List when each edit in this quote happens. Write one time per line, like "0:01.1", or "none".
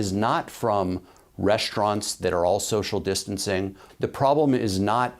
0:03.8